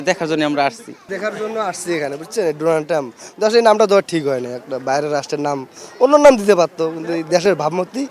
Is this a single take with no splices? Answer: no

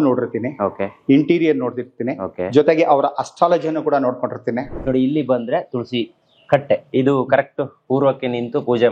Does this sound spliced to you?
yes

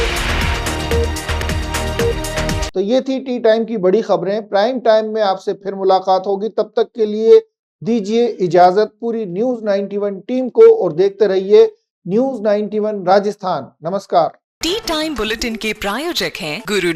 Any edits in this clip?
no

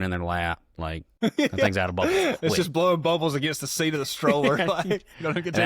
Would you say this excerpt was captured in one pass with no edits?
no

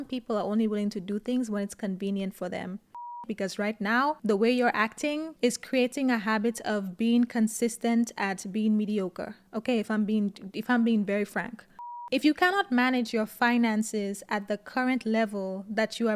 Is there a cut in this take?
yes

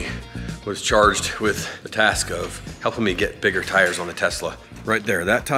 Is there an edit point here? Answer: yes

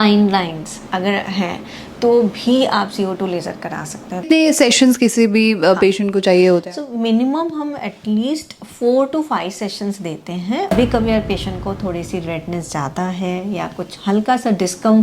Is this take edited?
yes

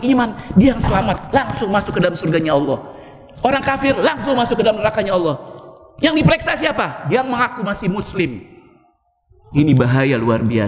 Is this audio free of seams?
yes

